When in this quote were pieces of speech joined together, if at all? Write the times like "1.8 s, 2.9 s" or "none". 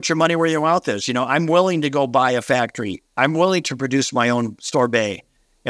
none